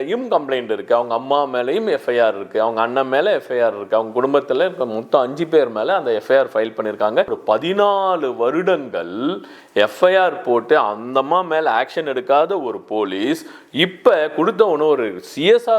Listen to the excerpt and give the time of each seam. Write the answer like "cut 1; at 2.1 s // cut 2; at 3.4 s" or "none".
cut 1; at 7.4 s